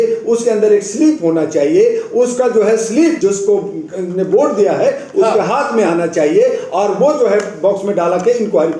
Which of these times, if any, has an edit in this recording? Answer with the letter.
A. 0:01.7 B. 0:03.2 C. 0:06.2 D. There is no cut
B